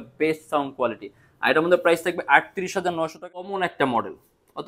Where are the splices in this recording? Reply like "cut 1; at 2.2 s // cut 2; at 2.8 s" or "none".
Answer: cut 1; at 3.5 s